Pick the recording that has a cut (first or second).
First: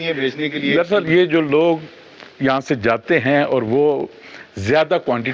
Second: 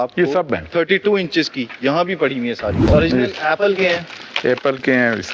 second